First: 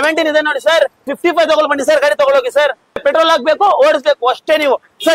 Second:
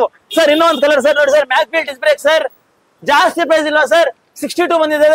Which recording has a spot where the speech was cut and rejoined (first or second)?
first